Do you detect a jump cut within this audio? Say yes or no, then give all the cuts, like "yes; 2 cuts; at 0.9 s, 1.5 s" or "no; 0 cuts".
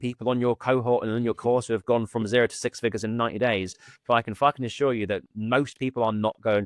no; 0 cuts